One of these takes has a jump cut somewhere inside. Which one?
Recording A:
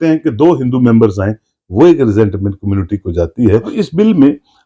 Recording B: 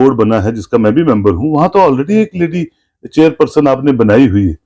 A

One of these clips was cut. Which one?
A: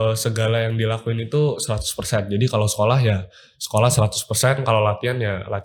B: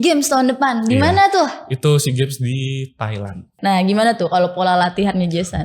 B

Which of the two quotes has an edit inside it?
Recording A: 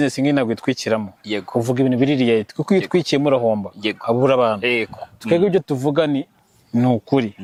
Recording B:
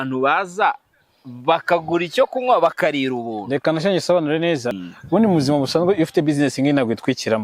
B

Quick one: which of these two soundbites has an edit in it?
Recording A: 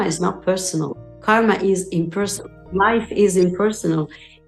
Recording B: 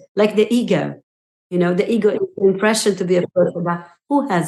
A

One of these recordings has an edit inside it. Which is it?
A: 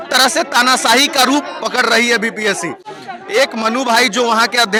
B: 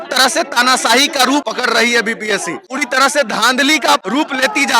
B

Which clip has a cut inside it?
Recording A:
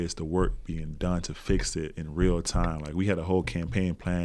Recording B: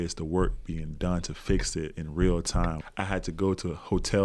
B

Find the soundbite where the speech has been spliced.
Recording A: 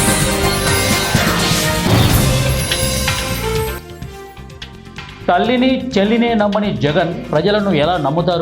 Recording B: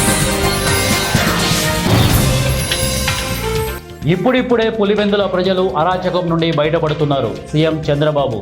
B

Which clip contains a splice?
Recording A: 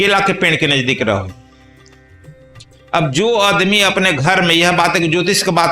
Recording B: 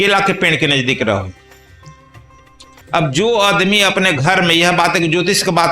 B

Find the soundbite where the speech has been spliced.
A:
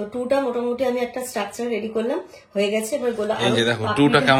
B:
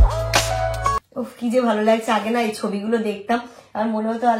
B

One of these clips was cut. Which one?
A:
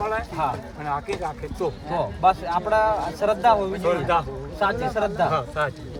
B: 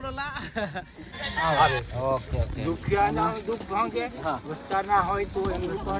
B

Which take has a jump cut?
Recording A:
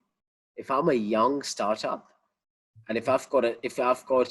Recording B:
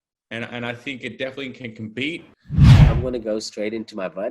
B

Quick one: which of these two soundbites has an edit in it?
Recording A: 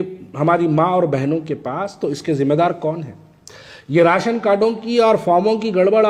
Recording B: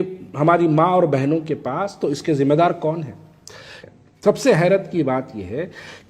B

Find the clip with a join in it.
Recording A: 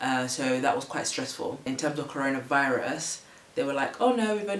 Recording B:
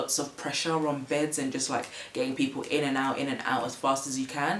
A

